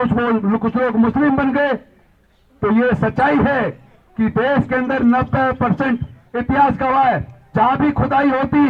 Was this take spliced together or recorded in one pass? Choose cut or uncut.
uncut